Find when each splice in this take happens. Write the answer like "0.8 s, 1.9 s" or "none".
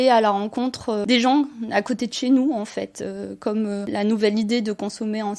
1.0 s, 3.9 s